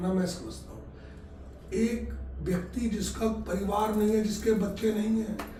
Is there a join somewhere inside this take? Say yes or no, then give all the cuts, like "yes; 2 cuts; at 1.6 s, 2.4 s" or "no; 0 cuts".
no; 0 cuts